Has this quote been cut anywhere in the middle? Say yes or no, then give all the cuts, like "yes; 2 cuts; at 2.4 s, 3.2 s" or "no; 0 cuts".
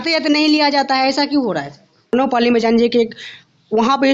yes; 1 cut; at 2.1 s